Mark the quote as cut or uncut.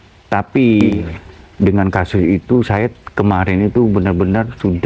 cut